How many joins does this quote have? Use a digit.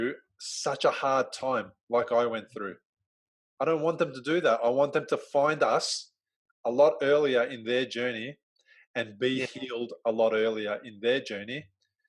0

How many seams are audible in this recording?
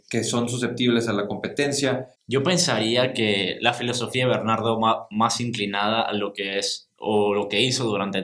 1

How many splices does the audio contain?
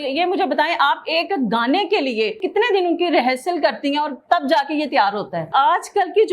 2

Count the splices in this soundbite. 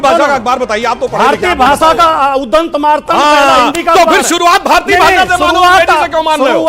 0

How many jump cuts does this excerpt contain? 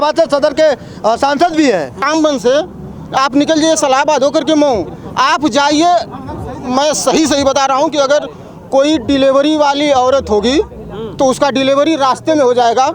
1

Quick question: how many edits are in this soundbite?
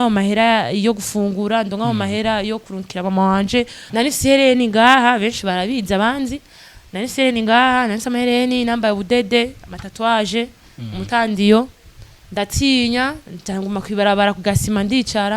1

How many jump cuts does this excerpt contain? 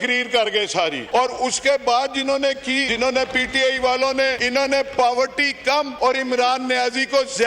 4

